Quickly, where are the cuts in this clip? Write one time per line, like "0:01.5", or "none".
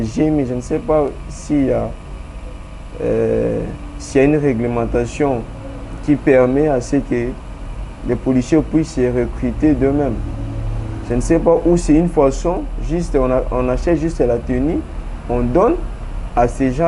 none